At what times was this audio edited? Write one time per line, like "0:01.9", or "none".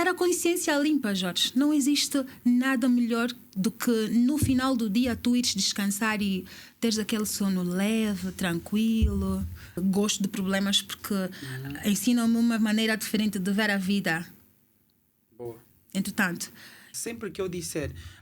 0:09.8
0:16.9